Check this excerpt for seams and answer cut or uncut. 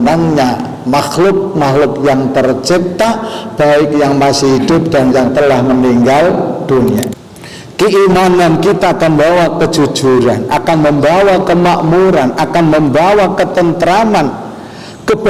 cut